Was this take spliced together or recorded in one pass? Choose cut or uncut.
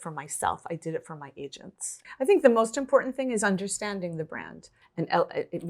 cut